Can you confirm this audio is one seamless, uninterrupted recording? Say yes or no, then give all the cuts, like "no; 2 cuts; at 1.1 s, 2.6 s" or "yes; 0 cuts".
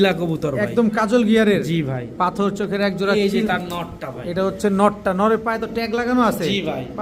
yes; 0 cuts